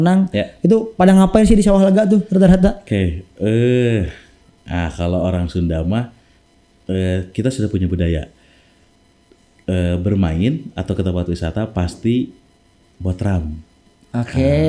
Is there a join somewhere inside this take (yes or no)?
no